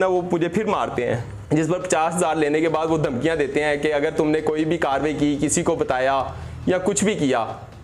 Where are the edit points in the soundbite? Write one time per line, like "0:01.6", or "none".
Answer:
0:01.3